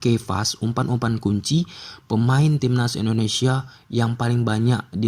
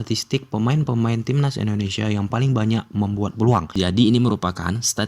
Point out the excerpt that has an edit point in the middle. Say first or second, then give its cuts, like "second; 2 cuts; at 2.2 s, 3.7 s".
second; 1 cut; at 3.7 s